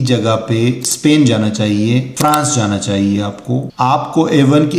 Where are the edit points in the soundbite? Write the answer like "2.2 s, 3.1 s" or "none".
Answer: 2.1 s, 3.7 s